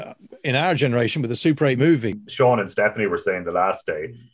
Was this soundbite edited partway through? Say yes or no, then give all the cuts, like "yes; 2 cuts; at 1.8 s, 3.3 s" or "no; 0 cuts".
yes; 1 cut; at 1.8 s